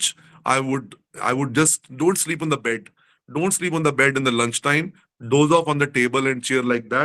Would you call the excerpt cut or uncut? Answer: uncut